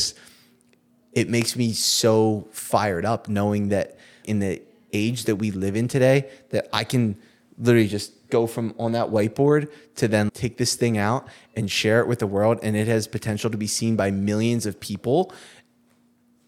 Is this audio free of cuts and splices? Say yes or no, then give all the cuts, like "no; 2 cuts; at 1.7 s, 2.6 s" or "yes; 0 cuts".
no; 2 cuts; at 4.2 s, 10.3 s